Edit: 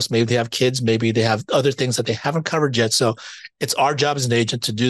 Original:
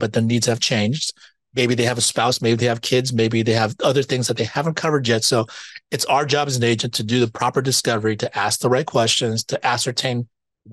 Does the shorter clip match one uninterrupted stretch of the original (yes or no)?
yes